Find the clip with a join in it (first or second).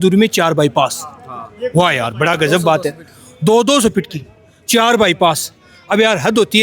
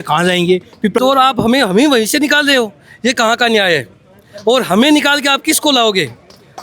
second